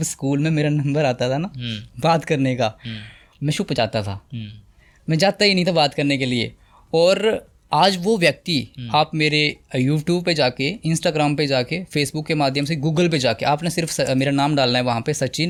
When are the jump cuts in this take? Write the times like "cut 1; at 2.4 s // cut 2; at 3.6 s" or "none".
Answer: none